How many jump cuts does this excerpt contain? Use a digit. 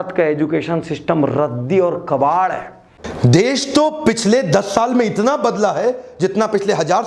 1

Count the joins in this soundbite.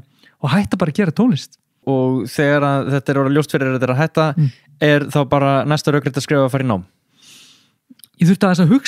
1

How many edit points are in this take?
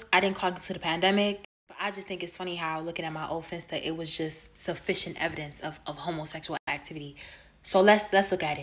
0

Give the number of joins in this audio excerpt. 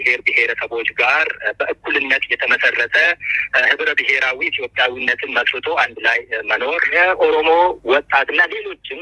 1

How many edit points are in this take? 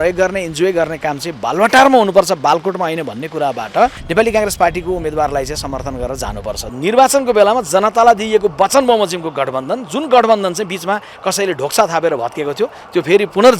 2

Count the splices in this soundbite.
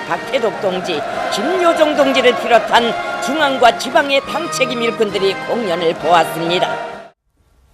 1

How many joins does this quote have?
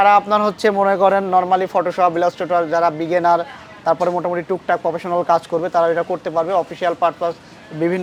0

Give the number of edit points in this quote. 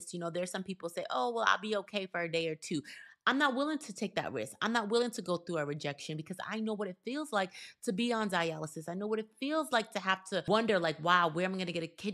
1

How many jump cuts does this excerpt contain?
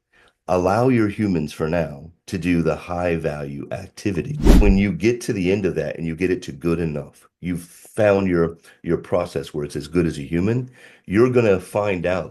1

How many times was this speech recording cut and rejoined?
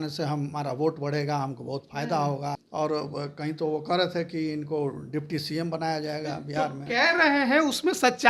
1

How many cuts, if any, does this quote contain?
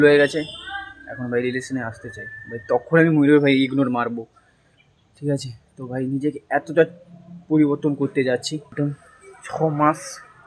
1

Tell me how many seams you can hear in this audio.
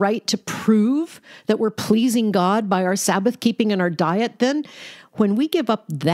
0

